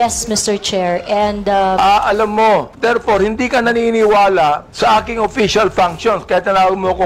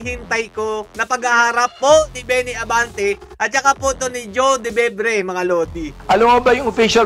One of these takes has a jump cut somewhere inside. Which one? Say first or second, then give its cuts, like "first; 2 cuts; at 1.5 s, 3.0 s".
second; 1 cut; at 5.9 s